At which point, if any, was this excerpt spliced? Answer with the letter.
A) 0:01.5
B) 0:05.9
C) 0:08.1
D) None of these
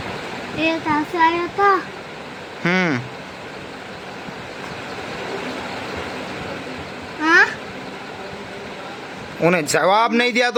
D